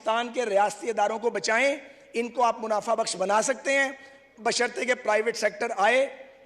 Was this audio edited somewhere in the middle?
no; 0 cuts

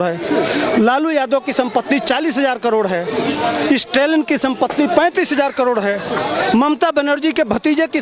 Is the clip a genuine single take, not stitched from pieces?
yes; 0 cuts

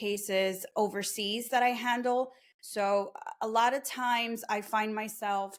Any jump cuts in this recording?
no; 0 cuts

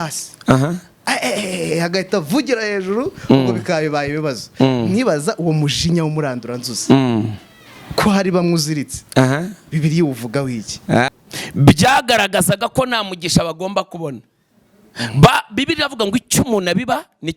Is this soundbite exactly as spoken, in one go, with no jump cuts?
no; 1 cut; at 11.1 s

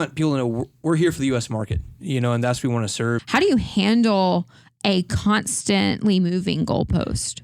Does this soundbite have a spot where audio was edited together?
yes; 1 cut; at 3.2 s

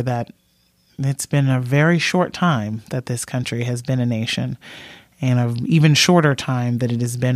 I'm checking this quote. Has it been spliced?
no; 0 cuts

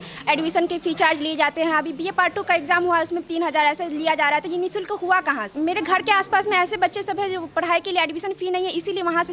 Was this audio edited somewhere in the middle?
no; 0 cuts

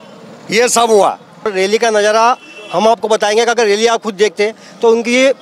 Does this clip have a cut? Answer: yes; 1 cut; at 1.5 s

